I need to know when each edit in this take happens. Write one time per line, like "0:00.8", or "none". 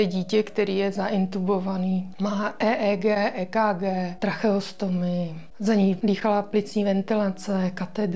0:02.1
0:04.1
0:05.4
0:06.0